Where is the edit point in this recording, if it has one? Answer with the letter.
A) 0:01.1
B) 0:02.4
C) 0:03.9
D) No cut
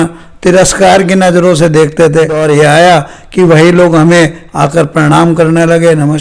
B